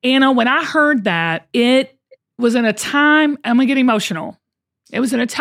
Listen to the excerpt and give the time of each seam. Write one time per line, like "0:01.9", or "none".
0:01.4